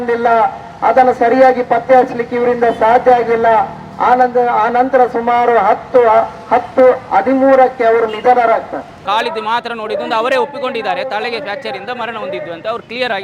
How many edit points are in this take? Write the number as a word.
one